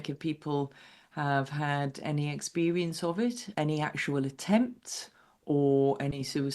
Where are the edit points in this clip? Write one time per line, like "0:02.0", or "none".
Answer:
0:03.5